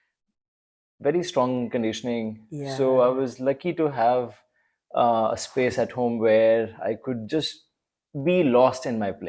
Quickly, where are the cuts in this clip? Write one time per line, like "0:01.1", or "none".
none